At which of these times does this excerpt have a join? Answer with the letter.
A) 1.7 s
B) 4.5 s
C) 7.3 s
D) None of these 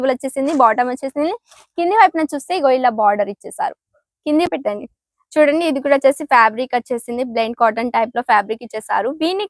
B